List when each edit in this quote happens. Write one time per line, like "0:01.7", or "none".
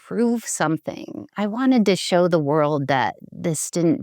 0:01.3